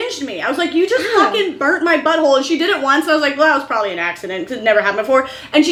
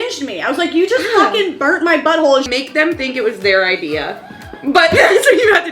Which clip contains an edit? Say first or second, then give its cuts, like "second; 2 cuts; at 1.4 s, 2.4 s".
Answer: second; 1 cut; at 2.5 s